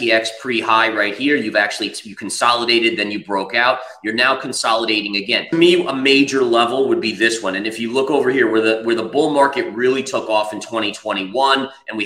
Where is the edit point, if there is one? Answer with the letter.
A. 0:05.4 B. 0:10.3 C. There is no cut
A